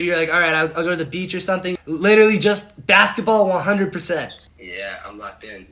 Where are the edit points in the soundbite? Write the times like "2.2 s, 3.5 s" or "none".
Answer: 1.8 s, 4.5 s